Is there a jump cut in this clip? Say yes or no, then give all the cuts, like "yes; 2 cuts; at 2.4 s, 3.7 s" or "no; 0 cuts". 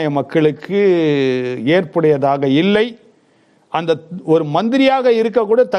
no; 0 cuts